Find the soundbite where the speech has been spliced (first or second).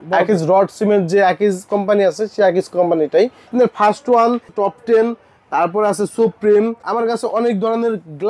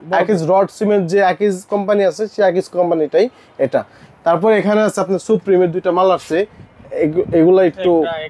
first